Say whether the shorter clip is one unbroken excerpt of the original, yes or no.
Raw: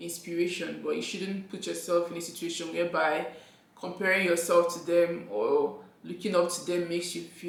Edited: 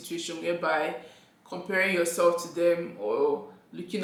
yes